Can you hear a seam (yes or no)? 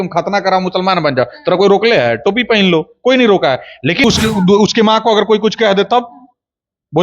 yes